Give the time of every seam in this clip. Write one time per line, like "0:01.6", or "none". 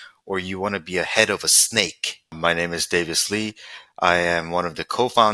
0:02.4